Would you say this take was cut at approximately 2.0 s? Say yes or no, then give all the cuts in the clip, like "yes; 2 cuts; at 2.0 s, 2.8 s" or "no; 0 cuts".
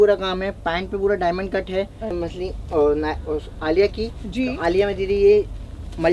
yes; 1 cut; at 2.0 s